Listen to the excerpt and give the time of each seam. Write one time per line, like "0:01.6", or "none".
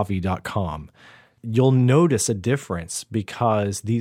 0:01.3